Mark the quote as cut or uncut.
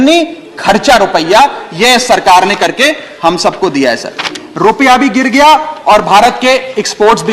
cut